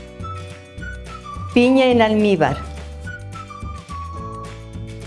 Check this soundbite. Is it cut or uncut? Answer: cut